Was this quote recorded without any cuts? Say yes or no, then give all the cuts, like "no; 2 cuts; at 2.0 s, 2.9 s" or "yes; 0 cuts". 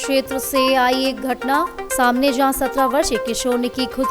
yes; 0 cuts